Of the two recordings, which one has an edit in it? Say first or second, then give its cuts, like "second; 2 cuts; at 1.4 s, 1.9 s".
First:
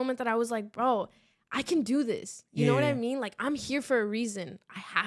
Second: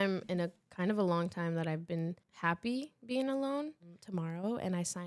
second; 2 cuts; at 2.3 s, 4.0 s